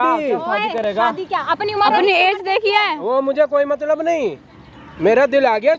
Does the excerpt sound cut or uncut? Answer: uncut